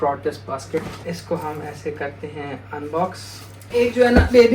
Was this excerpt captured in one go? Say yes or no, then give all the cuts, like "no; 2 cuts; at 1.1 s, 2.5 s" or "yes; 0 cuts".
no; 2 cuts; at 1.0 s, 3.5 s